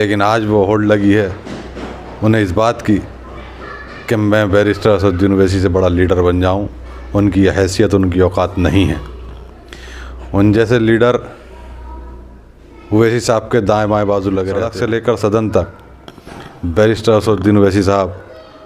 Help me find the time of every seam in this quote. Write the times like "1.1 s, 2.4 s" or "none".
14.7 s